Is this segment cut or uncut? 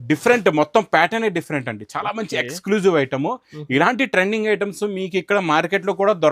uncut